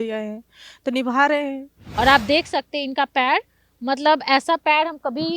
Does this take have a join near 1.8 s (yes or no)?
yes